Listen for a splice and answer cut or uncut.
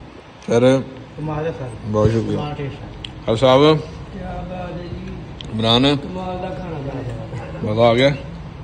uncut